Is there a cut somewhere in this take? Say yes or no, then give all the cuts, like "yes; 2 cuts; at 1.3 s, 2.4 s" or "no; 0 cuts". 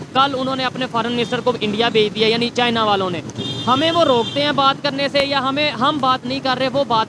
no; 0 cuts